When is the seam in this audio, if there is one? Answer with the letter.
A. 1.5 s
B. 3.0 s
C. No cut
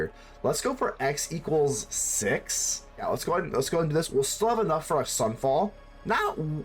B